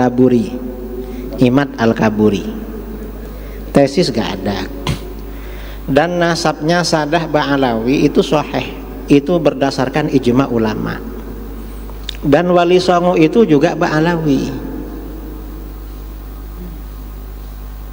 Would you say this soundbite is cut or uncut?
uncut